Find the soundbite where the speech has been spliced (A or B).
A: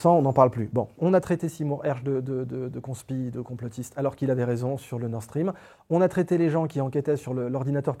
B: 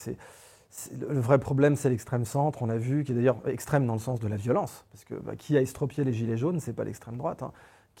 A